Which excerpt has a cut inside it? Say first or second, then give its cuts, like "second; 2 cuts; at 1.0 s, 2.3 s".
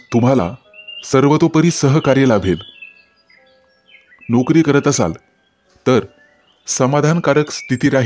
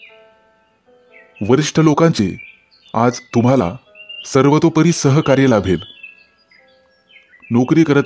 second; 1 cut; at 0.9 s